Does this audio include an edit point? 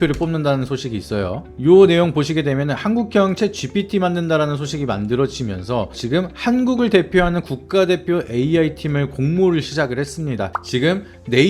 yes; 1 cut; at 10.5 s

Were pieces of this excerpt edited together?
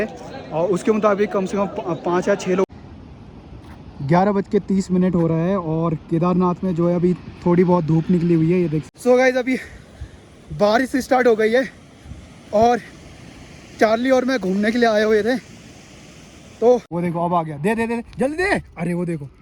yes; 3 cuts; at 2.6 s, 8.9 s, 16.9 s

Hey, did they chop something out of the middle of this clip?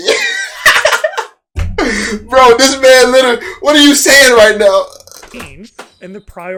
no; 0 cuts

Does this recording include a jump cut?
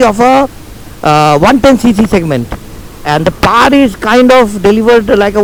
no; 0 cuts

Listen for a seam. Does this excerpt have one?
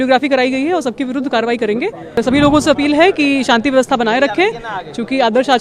yes; 1 cut; at 2.2 s

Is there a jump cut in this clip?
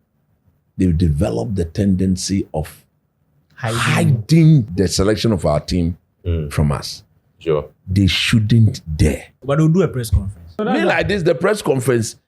yes; 3 cuts; at 4.7 s, 9.4 s, 10.6 s

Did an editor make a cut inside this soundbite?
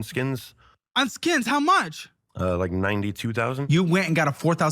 yes; 1 cut; at 3.6 s

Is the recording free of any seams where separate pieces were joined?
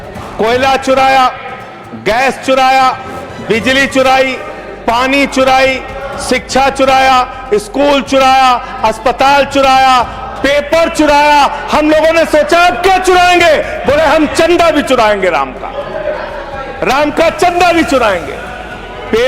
yes; 0 cuts

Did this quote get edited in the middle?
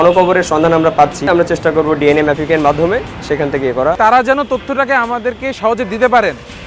yes; 2 cuts; at 1.2 s, 4.0 s

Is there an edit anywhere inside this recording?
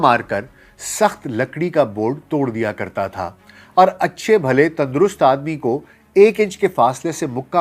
no; 0 cuts

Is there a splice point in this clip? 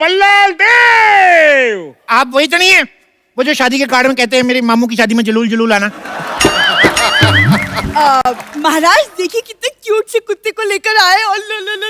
no; 0 cuts

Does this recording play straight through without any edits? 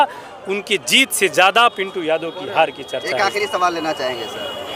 yes; 0 cuts

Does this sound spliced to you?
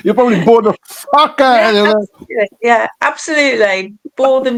no; 0 cuts

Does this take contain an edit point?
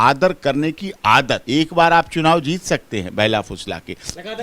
yes; 1 cut; at 1.4 s

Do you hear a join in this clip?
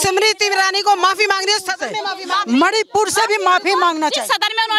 no; 0 cuts

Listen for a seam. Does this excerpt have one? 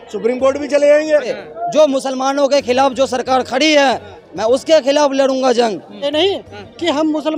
yes; 2 cuts; at 1.3 s, 6.0 s

